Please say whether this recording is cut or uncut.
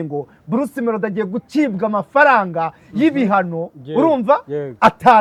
uncut